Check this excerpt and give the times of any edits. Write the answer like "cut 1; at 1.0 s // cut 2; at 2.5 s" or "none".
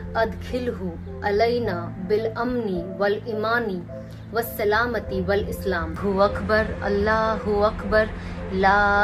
none